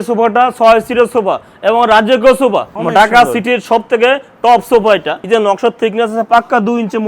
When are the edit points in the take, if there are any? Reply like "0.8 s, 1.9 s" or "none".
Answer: 2.8 s, 5.1 s